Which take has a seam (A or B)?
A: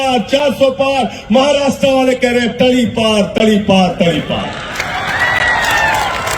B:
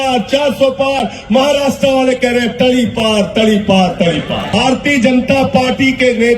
B